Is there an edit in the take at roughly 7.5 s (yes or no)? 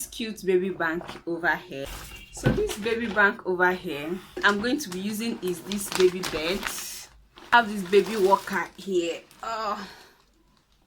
yes